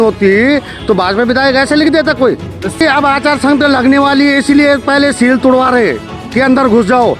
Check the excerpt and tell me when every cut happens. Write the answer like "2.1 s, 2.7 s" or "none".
2.8 s